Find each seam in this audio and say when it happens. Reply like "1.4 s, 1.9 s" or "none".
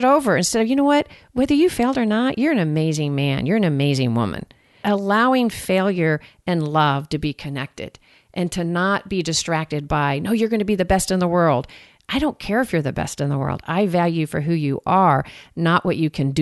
4.8 s